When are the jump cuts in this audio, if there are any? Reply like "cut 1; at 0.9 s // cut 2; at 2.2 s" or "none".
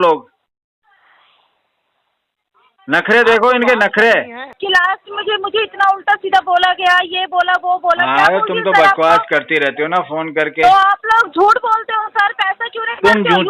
cut 1; at 4.4 s